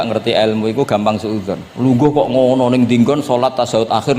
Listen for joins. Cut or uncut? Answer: cut